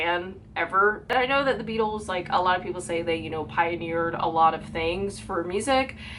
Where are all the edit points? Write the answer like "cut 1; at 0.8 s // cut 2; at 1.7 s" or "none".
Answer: cut 1; at 1.0 s